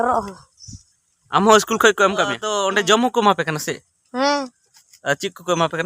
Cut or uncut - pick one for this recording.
cut